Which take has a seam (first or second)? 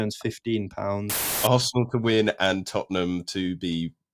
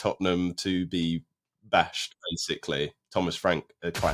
first